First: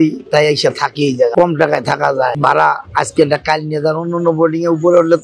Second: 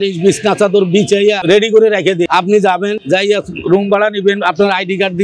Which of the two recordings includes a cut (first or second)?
first